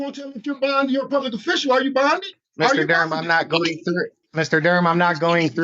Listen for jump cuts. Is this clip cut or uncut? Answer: cut